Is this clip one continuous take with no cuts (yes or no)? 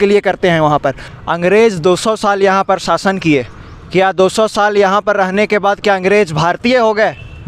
no